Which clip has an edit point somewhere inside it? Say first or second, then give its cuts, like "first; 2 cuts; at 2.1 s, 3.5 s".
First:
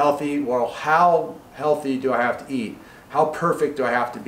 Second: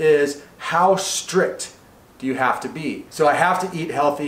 second; 1 cut; at 3.1 s